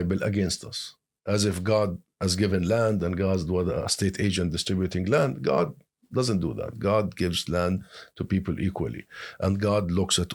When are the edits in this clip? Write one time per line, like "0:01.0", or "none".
none